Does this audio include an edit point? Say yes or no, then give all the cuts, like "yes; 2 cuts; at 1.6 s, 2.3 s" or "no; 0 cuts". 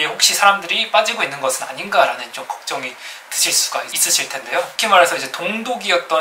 no; 0 cuts